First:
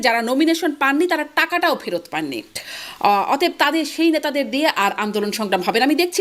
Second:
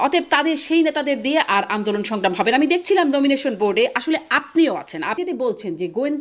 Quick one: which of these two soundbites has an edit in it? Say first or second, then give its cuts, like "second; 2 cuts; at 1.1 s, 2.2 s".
second; 1 cut; at 5.2 s